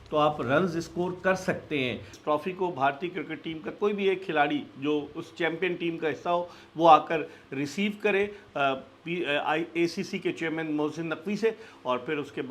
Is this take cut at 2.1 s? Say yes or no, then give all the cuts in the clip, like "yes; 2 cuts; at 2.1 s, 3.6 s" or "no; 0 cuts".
yes; 1 cut; at 2.1 s